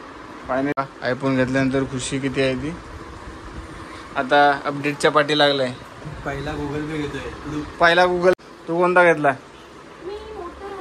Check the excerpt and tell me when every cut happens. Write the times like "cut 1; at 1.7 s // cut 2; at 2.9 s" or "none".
cut 1; at 0.7 s // cut 2; at 8.4 s